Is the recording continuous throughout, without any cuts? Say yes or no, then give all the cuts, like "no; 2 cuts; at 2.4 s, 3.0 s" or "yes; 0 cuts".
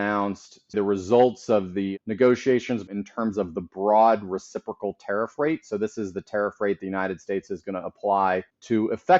no; 3 cuts; at 0.7 s, 1.9 s, 2.9 s